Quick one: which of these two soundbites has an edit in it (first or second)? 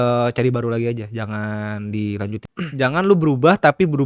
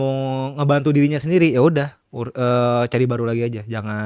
first